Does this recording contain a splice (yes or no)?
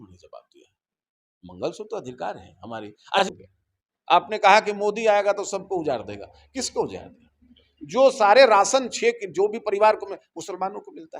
yes